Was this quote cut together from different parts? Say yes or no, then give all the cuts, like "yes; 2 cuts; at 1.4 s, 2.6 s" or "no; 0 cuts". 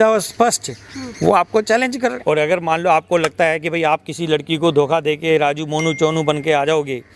yes; 1 cut; at 2.2 s